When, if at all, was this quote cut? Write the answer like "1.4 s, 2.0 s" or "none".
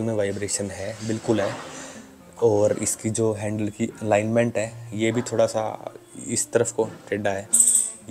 none